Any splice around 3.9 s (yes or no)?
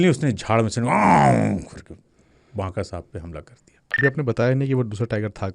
yes